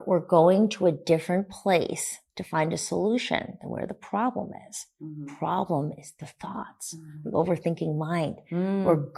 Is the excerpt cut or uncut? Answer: uncut